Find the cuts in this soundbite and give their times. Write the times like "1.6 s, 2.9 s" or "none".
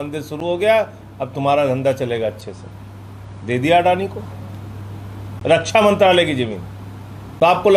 none